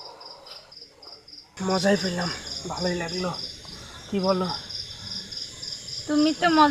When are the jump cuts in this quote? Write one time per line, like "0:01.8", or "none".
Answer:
0:01.5